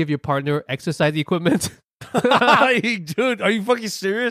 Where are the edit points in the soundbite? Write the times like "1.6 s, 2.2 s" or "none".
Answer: none